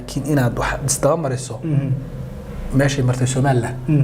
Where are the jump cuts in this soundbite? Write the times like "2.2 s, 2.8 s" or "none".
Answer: none

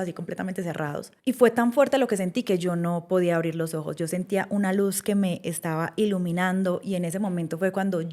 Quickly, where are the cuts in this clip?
1.1 s

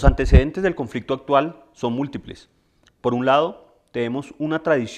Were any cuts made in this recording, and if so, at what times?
none

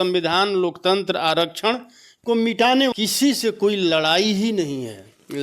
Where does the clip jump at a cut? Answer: 2.9 s

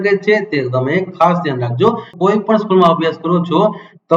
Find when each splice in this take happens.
2.1 s

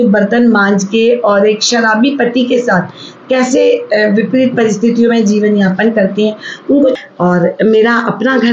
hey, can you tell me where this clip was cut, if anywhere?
6.9 s

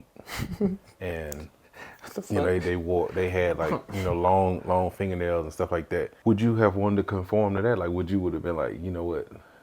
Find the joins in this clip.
6.1 s

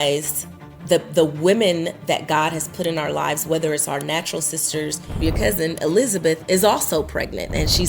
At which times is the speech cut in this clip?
5.2 s

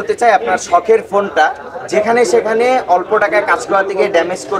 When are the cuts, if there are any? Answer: none

